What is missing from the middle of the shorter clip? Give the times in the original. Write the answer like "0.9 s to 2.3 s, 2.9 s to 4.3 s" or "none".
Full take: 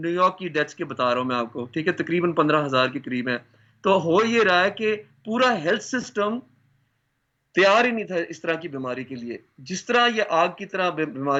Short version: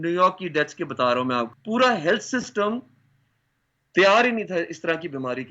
1.5 s to 5.1 s